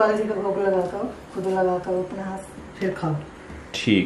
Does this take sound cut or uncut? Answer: uncut